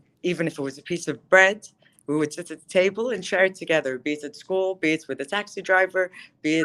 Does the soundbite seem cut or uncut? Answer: uncut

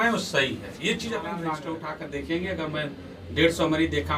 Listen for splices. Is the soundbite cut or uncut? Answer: cut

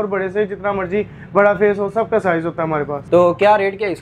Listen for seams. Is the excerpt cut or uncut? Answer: uncut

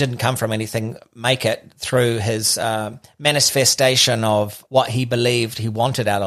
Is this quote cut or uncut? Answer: cut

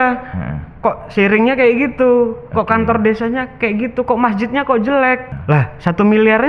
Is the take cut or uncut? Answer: cut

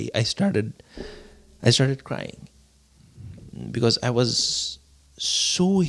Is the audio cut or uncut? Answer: uncut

